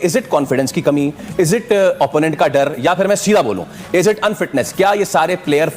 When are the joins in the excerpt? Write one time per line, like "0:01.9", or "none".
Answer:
none